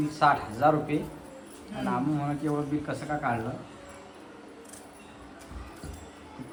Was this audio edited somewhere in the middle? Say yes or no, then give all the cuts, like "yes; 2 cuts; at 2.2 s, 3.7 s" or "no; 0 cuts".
no; 0 cuts